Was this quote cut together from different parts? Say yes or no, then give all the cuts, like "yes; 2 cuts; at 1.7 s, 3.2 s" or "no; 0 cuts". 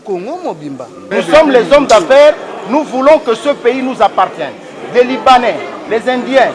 yes; 1 cut; at 1.0 s